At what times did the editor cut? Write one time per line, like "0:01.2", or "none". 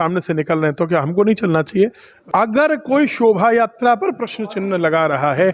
0:02.1